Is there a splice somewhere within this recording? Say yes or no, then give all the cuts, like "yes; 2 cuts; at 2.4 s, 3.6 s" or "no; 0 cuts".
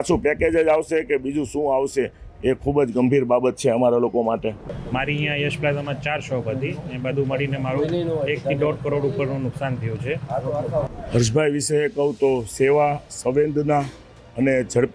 yes; 2 cuts; at 4.8 s, 10.8 s